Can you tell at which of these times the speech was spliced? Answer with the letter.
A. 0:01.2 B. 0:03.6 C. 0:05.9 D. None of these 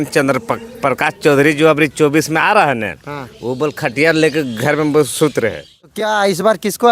C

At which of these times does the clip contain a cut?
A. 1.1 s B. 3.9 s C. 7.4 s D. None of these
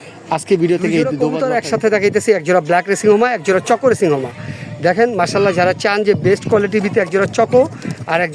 A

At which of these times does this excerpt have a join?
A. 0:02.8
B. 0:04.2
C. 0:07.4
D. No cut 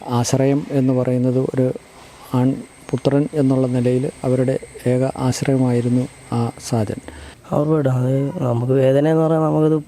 C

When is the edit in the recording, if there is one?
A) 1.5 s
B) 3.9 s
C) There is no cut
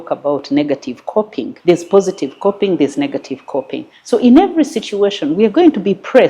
A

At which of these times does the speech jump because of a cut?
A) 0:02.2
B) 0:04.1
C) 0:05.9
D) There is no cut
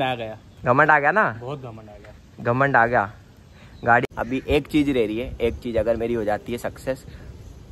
B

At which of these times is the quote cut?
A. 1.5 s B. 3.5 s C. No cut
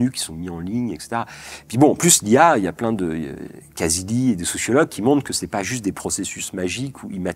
A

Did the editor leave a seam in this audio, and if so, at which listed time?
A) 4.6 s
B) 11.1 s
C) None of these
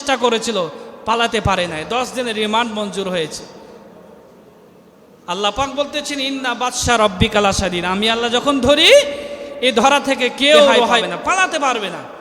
B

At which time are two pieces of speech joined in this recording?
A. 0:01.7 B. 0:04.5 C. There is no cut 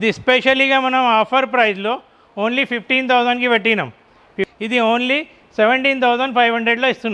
B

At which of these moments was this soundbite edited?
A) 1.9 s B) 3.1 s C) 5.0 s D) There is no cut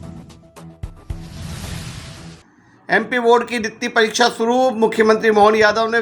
D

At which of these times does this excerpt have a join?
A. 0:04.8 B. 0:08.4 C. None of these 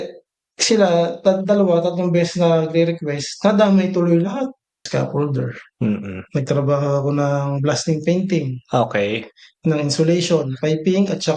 A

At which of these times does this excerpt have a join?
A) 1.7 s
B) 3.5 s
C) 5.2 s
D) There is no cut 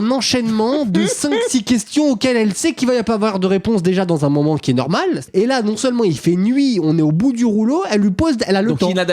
C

